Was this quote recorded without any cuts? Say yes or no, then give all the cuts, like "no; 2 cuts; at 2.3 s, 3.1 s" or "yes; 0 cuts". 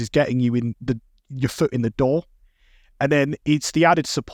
yes; 0 cuts